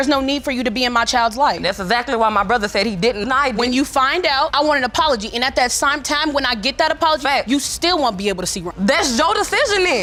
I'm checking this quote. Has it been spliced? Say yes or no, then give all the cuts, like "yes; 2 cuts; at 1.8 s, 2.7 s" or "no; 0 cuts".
no; 0 cuts